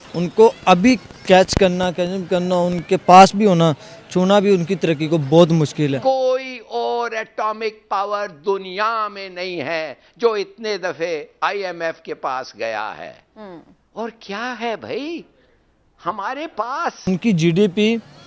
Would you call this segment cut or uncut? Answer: cut